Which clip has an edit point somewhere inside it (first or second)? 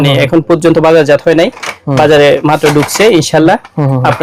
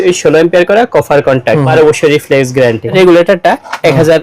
second